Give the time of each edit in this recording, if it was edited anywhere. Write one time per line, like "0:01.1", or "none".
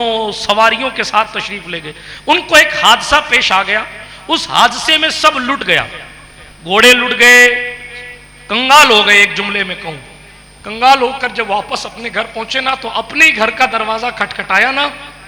none

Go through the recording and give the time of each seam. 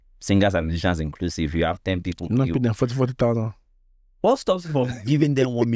none

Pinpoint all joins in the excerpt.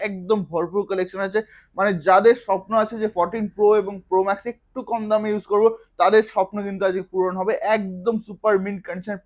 none

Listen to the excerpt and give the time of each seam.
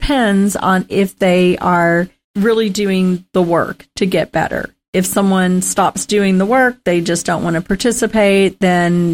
0:02.2

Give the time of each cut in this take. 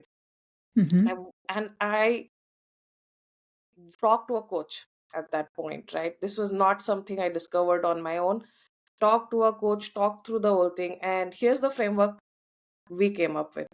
none

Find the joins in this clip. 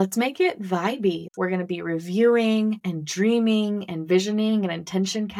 0:01.2
0:02.9

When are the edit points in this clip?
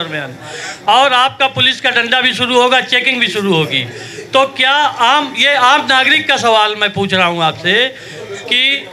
none

